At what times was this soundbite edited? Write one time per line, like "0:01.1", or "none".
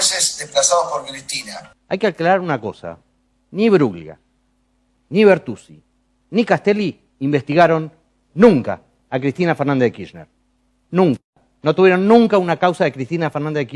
none